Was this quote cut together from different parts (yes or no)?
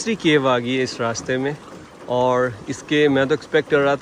no